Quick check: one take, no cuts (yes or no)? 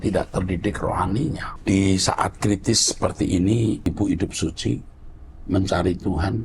no